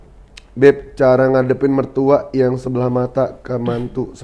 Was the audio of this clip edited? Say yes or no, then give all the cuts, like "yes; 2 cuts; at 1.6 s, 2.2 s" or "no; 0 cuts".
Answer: no; 0 cuts